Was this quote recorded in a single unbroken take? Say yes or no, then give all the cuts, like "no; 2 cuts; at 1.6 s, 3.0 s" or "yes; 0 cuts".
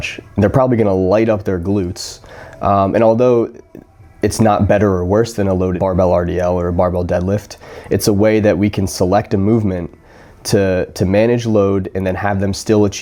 yes; 0 cuts